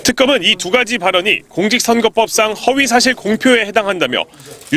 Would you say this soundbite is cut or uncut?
uncut